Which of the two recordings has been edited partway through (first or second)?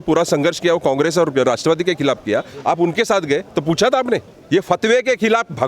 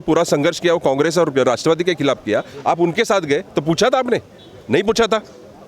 first